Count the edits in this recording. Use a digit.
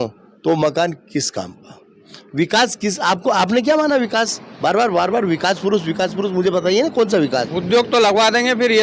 1